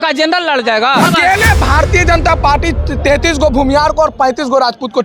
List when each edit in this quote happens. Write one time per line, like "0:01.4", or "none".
0:01.0